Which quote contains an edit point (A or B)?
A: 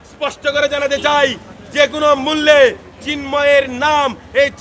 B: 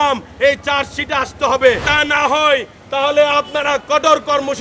B